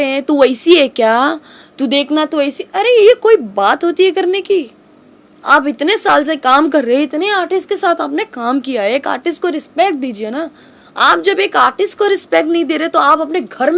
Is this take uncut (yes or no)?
yes